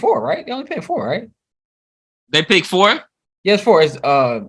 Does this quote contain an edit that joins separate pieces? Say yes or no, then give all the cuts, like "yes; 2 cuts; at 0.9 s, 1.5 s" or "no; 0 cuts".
no; 0 cuts